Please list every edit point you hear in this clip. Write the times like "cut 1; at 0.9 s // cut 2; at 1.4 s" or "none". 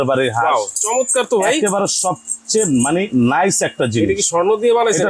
none